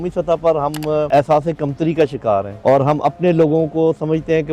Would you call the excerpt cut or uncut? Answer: cut